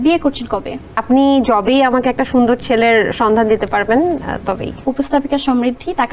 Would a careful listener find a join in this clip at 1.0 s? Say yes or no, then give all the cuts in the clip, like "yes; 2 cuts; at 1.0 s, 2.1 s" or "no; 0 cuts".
yes; 2 cuts; at 1.0 s, 4.8 s